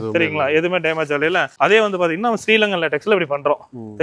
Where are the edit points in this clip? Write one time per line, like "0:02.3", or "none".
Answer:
0:01.5